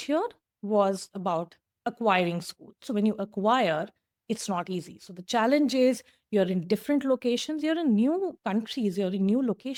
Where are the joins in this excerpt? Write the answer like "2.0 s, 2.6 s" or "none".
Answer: none